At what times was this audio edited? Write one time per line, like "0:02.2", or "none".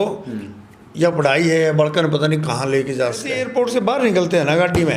0:03.4